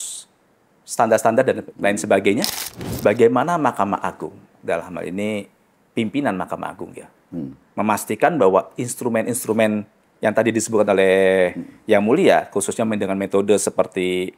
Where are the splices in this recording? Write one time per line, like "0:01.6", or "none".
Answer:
0:01.7
0:02.9